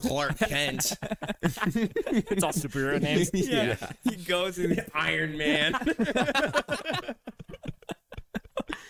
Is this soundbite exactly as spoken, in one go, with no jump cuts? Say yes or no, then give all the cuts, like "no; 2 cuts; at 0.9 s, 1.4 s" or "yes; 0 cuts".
yes; 0 cuts